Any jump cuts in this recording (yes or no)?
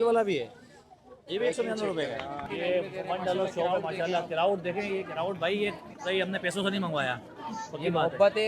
yes